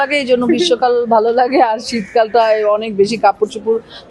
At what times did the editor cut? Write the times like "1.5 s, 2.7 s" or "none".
none